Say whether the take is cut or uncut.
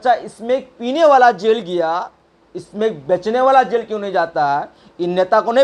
uncut